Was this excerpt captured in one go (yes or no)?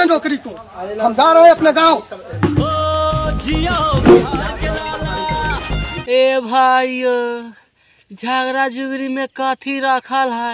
no